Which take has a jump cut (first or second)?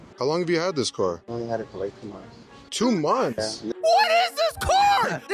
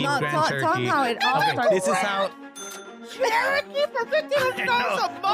first